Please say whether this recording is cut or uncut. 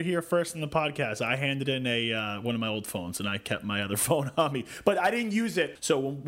uncut